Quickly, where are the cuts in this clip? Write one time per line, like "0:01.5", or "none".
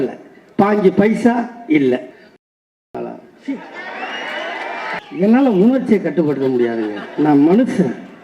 0:02.2
0:05.0